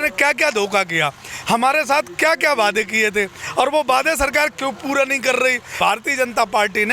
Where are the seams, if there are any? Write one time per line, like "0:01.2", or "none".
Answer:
0:05.7